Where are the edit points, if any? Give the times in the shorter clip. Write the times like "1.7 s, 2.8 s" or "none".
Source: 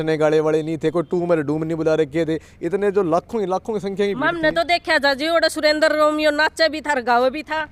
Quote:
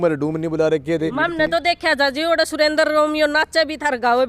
1.1 s